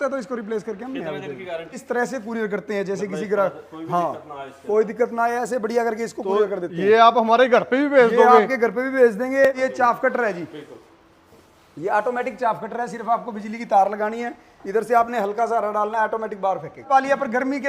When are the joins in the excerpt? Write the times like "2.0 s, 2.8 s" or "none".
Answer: 1.8 s, 9.6 s, 16.8 s